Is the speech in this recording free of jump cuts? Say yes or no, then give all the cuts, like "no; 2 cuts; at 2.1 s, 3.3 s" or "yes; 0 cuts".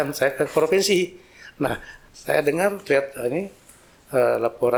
yes; 0 cuts